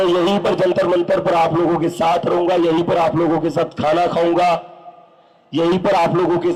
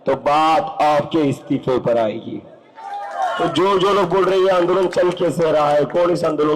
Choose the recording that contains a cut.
second; 1 cut; at 3.4 s

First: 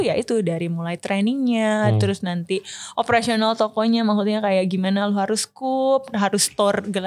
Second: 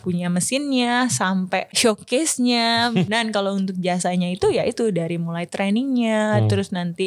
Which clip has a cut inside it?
second; 2 cuts; at 1.7 s, 3.1 s

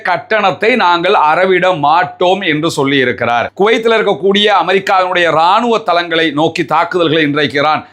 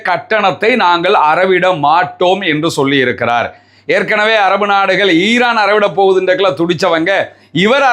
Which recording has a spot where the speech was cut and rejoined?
first; 1 cut; at 3.5 s

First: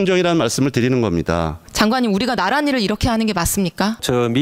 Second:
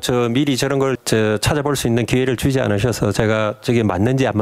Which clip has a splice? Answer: first; 1 cut; at 1.6 s

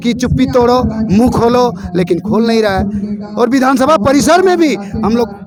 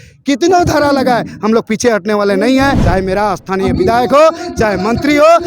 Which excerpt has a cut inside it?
second; 1 cut; at 2.8 s

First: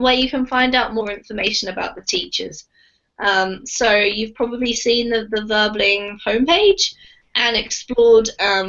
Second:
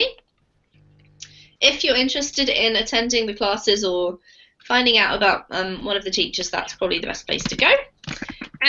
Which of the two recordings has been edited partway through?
first; 1 cut; at 3.2 s

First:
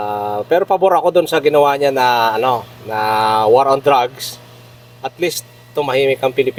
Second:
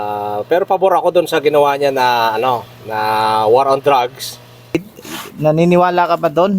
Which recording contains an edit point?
second; 1 cut; at 4.7 s

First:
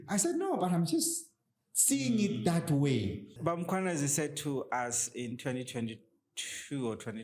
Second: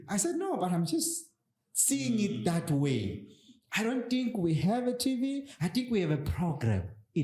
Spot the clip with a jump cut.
first; 1 cut; at 3.3 s

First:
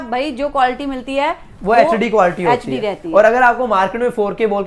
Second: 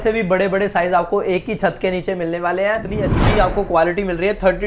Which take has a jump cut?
second; 1 cut; at 2.9 s

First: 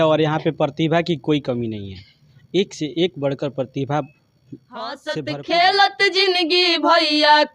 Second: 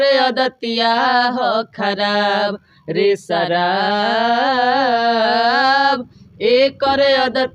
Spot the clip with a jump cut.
first; 1 cut; at 5.0 s

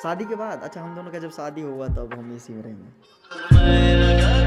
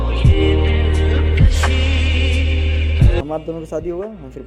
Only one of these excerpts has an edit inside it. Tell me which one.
second; 1 cut; at 3.2 s

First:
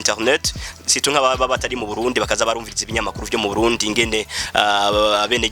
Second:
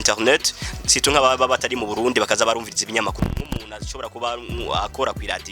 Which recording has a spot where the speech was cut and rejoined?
second; 1 cut; at 3.1 s

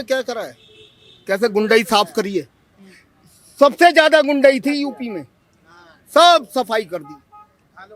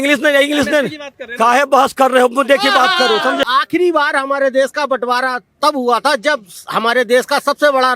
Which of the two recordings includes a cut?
second; 1 cut; at 3.4 s

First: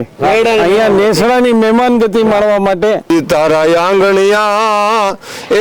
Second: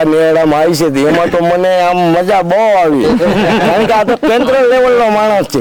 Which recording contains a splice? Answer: first; 1 cut; at 3.1 s

